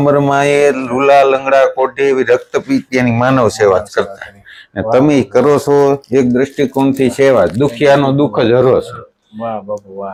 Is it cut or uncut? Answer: uncut